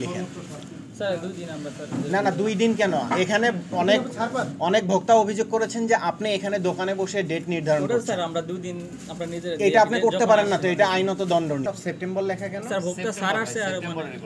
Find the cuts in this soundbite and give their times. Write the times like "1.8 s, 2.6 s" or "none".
11.6 s